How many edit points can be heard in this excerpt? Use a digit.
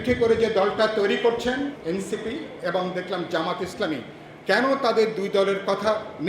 1